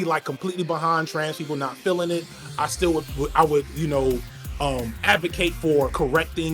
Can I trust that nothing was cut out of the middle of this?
yes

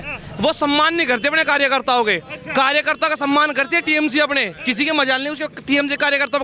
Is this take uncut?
yes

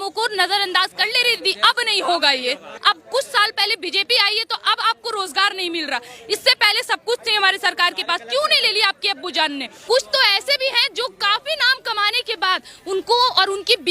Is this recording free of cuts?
no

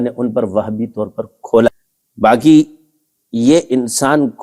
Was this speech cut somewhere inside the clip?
yes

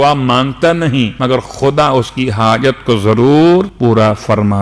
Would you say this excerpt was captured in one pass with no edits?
no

